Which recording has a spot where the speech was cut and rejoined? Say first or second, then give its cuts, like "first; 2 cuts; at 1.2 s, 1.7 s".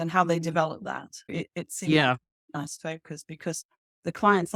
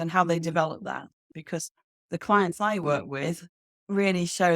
second; 1 cut; at 1.2 s